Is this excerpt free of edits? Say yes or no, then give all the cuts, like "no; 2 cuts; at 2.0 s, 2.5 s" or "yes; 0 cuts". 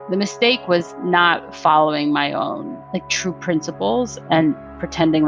yes; 0 cuts